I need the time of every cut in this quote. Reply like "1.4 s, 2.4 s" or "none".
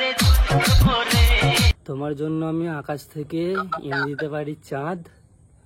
1.7 s